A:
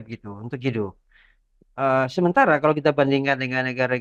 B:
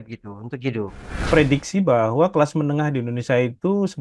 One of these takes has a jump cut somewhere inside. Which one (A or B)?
B